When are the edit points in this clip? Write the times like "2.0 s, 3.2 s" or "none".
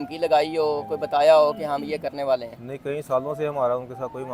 none